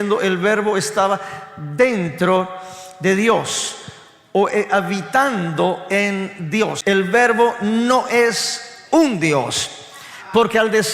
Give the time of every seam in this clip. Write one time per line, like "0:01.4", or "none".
0:06.8